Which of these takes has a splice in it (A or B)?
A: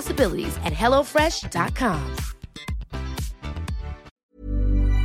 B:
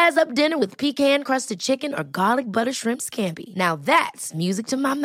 A